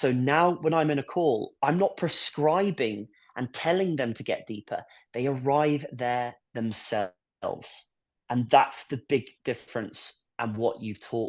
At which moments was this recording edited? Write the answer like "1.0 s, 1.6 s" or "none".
none